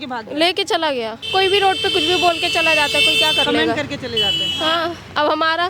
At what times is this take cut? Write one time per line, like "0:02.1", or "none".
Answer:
0:01.3